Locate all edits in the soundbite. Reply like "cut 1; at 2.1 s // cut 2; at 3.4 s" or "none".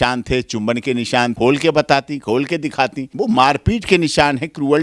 cut 1; at 1.3 s // cut 2; at 3.1 s